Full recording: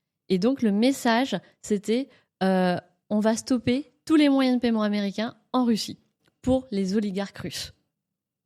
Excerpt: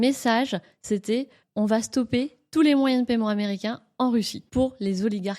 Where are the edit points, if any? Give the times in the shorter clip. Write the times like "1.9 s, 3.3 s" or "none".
1.4 s, 4.4 s